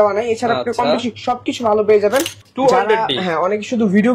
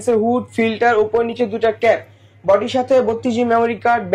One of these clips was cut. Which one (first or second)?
first